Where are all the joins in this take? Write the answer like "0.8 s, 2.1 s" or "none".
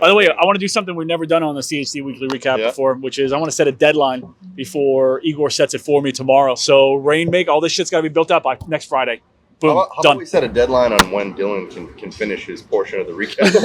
none